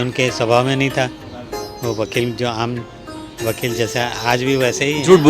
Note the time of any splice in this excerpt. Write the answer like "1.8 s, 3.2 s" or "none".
none